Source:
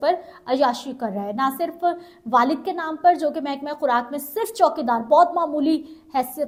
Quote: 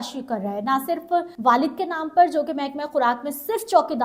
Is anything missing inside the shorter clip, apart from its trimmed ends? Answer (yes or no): yes